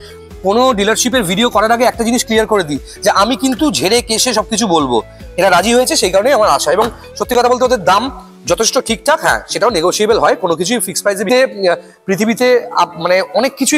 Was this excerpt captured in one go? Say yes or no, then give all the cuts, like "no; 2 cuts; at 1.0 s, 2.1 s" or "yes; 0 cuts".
yes; 0 cuts